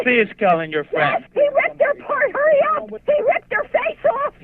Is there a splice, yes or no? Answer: yes